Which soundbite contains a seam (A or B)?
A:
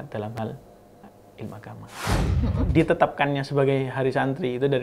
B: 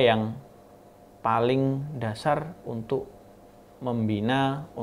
A